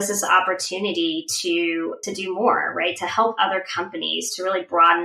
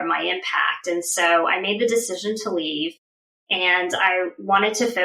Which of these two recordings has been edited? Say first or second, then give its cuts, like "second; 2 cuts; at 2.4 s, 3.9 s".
first; 1 cut; at 2.0 s